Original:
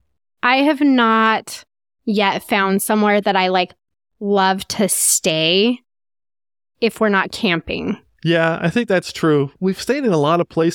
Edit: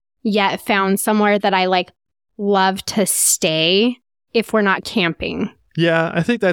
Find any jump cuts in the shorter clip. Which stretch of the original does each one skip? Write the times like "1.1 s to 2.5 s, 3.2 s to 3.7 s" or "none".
5.9 s to 6.6 s